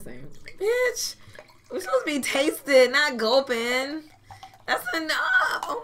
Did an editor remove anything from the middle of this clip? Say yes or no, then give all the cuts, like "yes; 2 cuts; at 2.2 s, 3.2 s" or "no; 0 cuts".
no; 0 cuts